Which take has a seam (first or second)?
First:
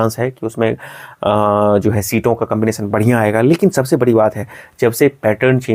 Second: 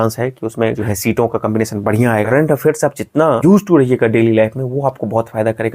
second